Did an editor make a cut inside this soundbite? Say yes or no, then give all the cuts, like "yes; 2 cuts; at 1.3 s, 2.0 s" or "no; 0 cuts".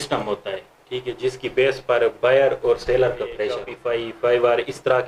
yes; 1 cut; at 3.7 s